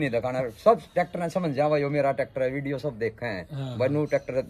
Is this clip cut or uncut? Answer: uncut